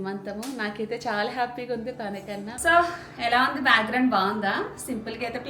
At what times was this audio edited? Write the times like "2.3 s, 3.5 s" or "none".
2.6 s